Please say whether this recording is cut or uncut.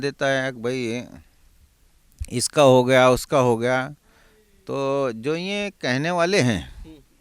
uncut